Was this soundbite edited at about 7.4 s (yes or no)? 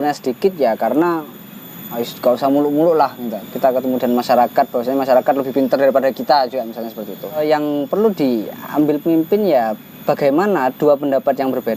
yes